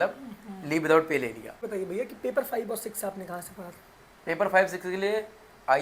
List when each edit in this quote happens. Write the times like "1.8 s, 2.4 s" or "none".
1.5 s